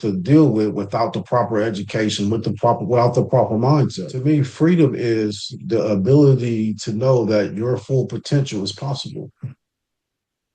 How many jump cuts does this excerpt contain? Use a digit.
1